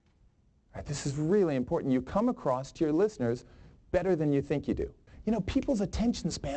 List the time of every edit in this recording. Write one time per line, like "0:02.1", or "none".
0:05.0